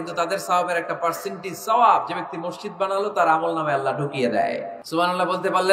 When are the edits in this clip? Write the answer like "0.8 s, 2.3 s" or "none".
4.8 s